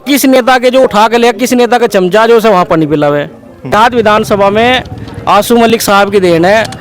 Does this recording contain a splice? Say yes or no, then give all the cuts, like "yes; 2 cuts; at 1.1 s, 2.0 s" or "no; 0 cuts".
yes; 1 cut; at 3.7 s